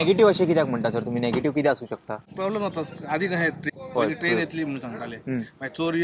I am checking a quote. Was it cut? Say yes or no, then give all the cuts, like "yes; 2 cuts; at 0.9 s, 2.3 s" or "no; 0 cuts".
yes; 2 cuts; at 2.3 s, 3.6 s